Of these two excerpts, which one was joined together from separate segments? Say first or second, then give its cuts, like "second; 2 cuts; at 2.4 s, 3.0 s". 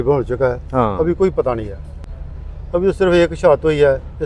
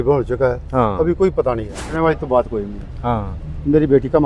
second; 1 cut; at 1.9 s